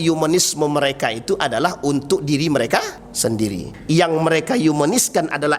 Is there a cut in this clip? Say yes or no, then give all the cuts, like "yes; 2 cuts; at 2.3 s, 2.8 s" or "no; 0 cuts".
yes; 1 cut; at 3.4 s